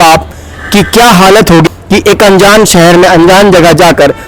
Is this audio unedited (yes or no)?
no